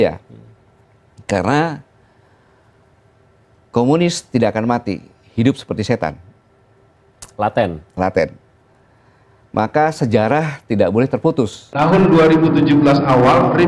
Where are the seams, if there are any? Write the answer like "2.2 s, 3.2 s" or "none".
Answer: 11.6 s